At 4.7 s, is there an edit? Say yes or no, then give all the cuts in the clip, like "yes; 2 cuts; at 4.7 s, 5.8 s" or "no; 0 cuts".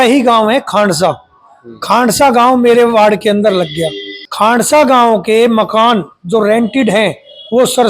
yes; 1 cut; at 4.7 s